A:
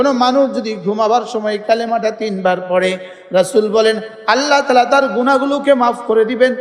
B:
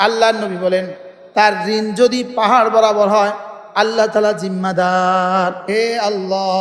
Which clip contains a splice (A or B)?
B